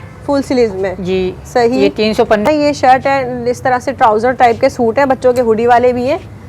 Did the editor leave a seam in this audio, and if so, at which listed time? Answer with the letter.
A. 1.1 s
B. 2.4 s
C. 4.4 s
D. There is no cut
B